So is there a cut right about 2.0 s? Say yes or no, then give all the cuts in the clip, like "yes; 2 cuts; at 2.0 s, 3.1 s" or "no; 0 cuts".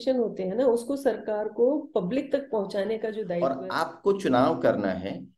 no; 1 cut; at 3.3 s